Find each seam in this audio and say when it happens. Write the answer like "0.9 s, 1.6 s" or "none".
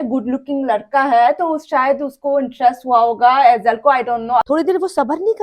4.4 s